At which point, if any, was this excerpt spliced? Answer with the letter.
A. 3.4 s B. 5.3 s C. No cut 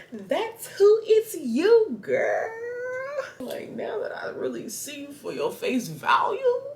A